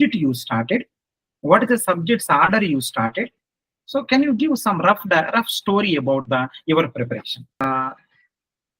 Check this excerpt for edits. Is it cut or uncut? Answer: cut